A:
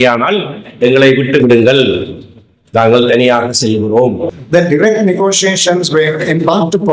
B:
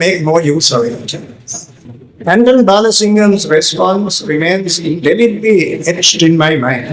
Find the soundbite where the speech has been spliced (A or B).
A